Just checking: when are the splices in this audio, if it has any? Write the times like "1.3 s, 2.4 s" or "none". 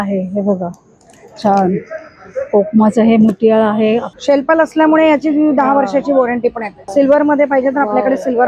4.1 s, 6.7 s